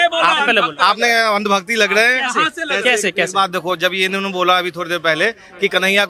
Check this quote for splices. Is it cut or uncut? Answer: uncut